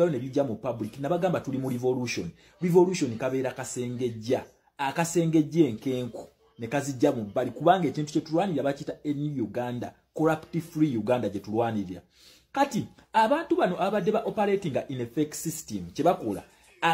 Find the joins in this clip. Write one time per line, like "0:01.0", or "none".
none

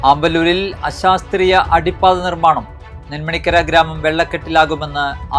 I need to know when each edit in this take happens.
none

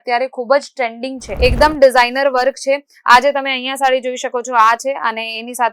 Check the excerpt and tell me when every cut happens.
0:01.3

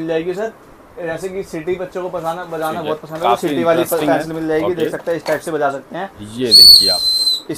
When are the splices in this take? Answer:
none

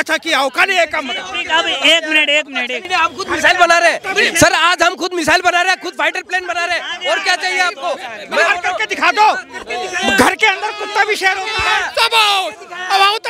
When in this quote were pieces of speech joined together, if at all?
0:02.8

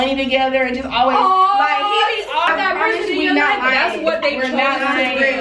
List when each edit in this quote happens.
0:02.5

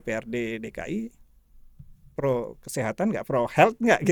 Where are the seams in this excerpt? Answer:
none

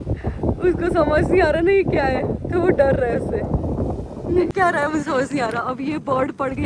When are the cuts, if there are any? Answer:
0:04.5

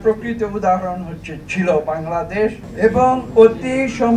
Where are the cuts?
0:02.6

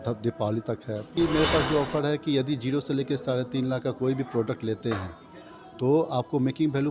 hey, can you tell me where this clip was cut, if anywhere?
0:01.2

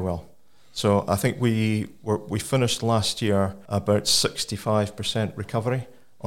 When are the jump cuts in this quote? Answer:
0:03.6

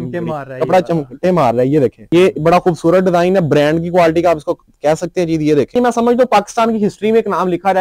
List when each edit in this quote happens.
0:02.0
0:05.8

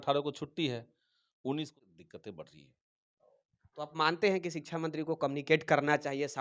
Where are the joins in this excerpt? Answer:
0:01.8

